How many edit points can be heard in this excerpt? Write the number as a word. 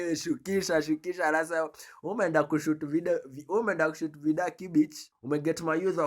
one